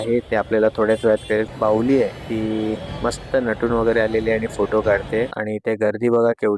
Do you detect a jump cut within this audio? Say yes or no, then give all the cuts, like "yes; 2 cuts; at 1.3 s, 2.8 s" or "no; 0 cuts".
yes; 2 cuts; at 1.5 s, 5.4 s